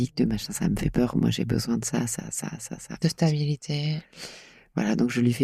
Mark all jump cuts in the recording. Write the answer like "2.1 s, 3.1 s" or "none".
none